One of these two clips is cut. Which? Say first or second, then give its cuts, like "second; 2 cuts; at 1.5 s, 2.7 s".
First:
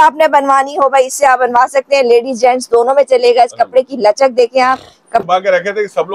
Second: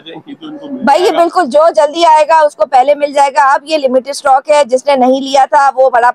first; 1 cut; at 5.2 s